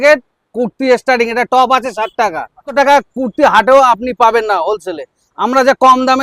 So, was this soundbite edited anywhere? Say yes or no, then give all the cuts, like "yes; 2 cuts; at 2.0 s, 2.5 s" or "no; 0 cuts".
yes; 1 cut; at 2.7 s